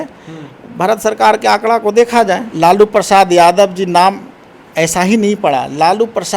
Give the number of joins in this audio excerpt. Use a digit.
1